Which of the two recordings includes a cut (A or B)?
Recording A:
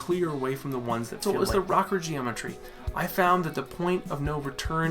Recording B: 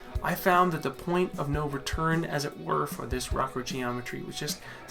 A